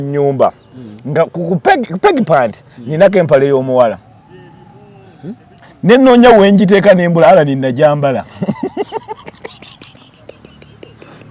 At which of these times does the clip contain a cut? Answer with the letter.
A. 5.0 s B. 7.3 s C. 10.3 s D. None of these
D